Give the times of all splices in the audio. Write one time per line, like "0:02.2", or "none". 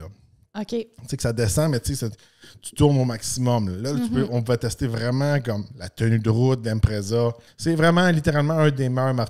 0:07.5